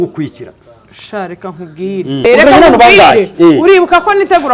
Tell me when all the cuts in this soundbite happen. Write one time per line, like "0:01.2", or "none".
0:02.2